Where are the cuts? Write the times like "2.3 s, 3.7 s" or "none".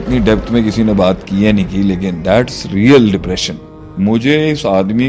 3.9 s

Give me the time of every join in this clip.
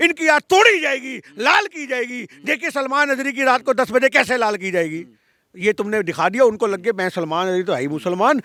none

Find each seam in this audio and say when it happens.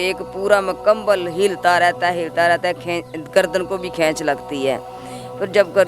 none

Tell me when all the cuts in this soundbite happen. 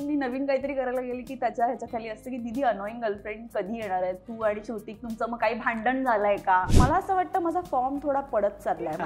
6.7 s

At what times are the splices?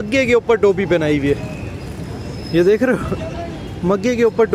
none

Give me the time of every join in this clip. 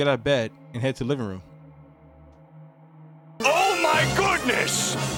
none

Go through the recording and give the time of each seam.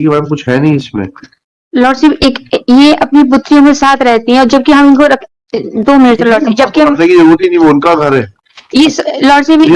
none

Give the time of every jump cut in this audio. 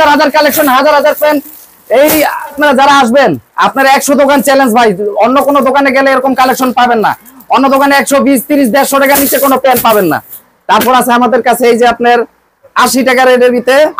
none

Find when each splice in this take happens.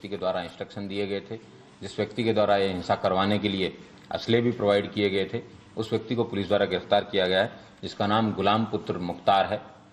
4.7 s

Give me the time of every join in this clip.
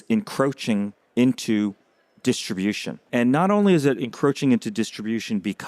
3.1 s

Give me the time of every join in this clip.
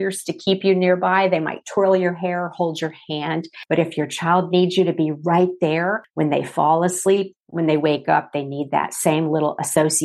3.5 s, 6.0 s, 7.4 s

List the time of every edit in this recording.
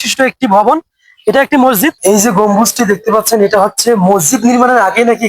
2.0 s

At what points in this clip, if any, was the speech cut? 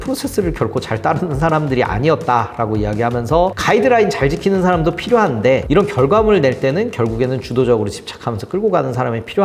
none

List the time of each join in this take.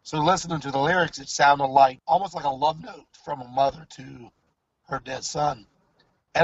2.0 s

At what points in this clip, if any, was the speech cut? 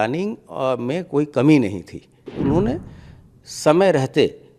2.2 s

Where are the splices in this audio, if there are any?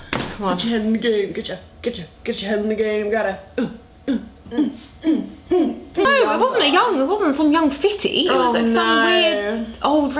6.0 s

